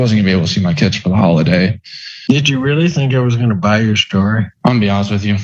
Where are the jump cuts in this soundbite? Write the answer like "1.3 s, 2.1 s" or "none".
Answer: 1.8 s